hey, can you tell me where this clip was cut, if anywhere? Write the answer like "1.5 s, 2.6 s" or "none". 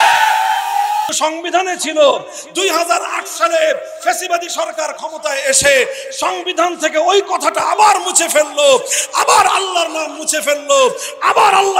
1.1 s